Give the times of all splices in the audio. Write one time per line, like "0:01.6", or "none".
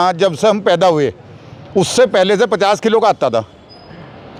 none

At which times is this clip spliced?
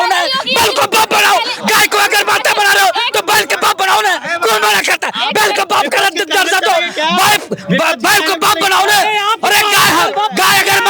none

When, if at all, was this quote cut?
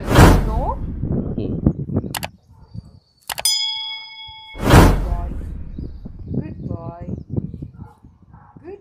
none

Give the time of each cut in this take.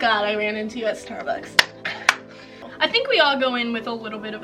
0:02.6

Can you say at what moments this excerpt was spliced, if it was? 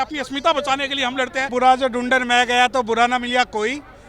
0:01.5

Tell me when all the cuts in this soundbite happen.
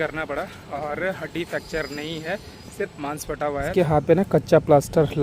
0:03.7

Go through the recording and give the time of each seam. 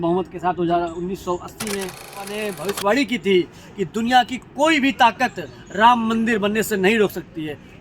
0:02.4

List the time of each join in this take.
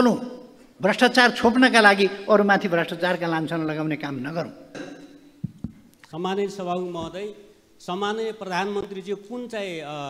0:04.7

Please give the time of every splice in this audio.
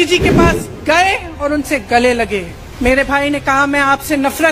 0:02.6

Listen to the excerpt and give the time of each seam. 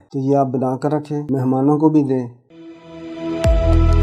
0:01.2
0:02.4

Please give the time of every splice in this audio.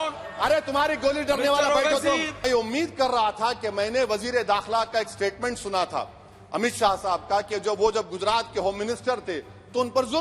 0:02.5

